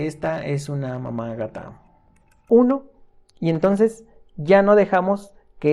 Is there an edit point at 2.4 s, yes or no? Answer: yes